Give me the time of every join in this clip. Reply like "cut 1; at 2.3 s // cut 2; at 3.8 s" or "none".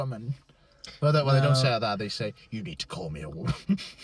none